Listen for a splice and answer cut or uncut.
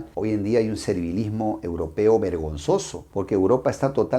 uncut